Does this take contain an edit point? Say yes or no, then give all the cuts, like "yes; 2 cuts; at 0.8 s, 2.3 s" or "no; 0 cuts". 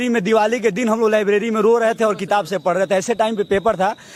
no; 0 cuts